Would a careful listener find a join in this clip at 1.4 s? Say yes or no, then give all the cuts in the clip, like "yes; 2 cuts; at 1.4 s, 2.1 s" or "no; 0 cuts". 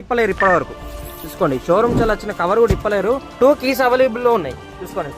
no; 1 cut; at 3.3 s